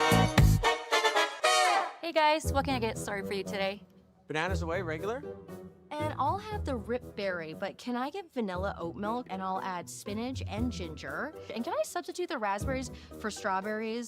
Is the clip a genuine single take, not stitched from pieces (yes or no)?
no